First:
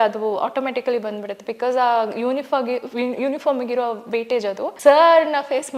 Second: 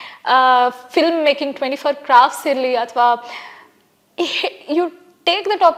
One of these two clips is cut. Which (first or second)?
first